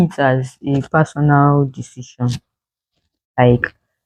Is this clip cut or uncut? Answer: uncut